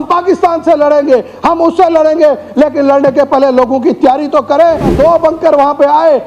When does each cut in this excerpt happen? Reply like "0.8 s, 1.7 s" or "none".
4.9 s